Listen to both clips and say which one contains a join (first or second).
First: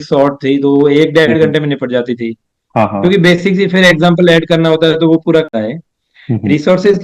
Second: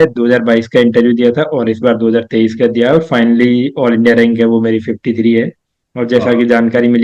first